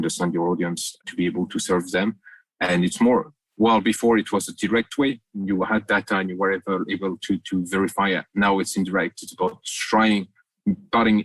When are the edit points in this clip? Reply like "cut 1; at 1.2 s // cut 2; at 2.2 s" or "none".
cut 1; at 1.0 s